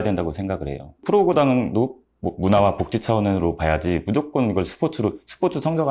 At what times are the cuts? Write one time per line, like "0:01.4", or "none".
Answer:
0:01.0